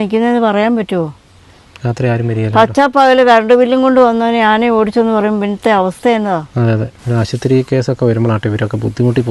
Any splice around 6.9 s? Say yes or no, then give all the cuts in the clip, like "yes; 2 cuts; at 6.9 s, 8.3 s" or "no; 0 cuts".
no; 0 cuts